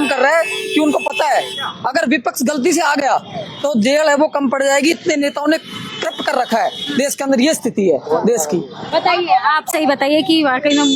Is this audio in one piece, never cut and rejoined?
yes; 0 cuts

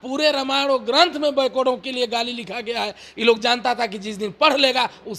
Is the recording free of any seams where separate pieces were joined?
yes; 0 cuts

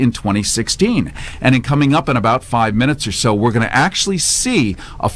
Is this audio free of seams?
yes; 0 cuts

